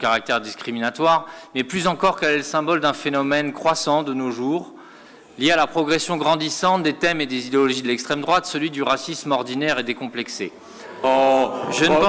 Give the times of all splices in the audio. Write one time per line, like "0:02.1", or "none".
none